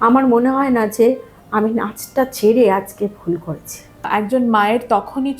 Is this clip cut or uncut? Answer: cut